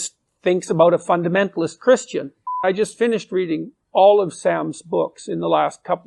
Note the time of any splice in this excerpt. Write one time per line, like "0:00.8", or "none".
0:02.6